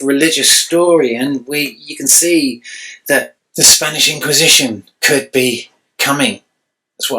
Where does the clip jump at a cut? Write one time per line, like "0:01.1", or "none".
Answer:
0:03.4